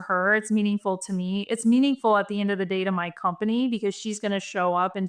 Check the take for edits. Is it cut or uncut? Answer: uncut